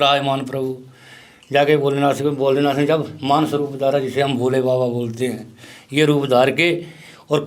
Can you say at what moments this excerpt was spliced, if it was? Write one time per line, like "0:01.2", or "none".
none